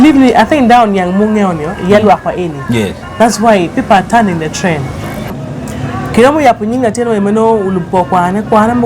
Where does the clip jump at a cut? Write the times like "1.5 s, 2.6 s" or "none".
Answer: 5.4 s